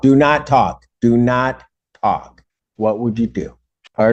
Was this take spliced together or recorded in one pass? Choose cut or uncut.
uncut